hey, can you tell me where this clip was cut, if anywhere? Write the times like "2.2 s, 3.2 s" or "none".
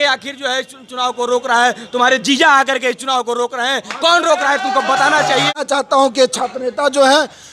5.5 s